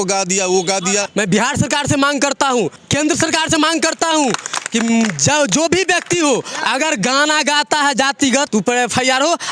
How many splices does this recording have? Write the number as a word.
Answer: three